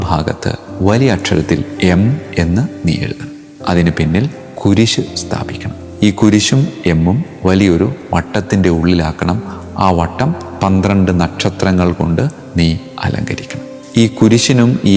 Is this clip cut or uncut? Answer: uncut